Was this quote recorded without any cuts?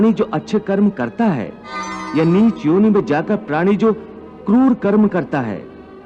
no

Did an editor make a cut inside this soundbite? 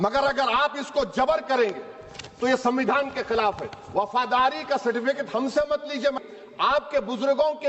yes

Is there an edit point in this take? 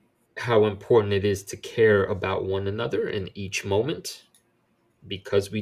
no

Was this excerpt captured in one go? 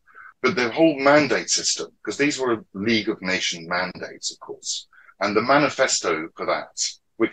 yes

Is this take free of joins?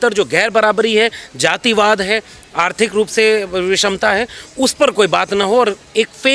yes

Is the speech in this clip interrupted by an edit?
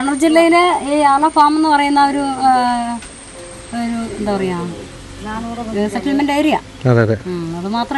no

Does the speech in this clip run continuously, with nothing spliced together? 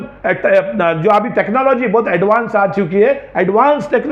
yes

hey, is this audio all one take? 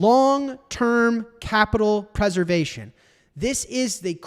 yes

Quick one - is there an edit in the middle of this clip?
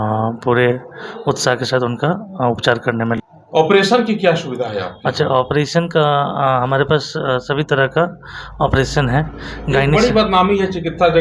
no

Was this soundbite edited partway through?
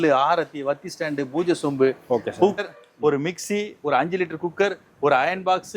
yes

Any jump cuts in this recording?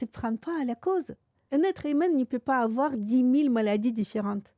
yes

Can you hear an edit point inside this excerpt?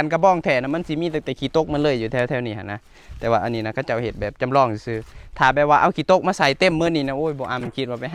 no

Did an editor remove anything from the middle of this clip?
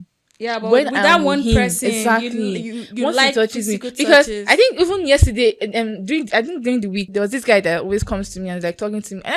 no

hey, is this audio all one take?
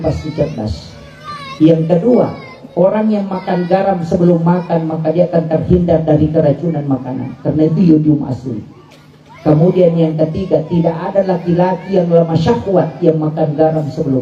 yes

